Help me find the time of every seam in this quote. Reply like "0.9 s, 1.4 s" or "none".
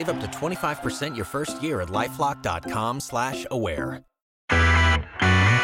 4.4 s